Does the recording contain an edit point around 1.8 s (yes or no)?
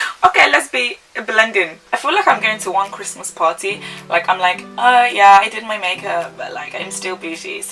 yes